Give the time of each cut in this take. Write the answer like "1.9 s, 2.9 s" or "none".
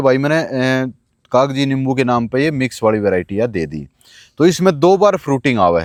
none